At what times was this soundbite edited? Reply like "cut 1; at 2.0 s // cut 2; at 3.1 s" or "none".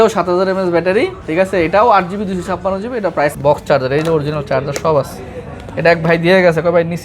cut 1; at 3.3 s